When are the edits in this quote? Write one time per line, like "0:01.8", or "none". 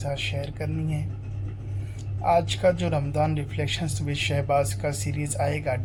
none

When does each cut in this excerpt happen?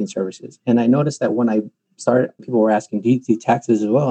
0:02.4

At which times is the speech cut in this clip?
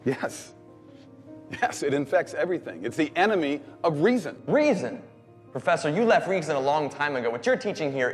none

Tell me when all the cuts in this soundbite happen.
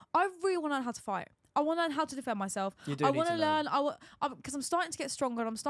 none

